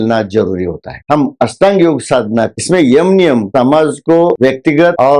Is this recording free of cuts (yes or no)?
no